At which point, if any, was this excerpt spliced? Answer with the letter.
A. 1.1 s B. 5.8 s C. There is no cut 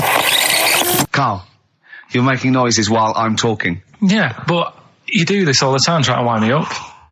A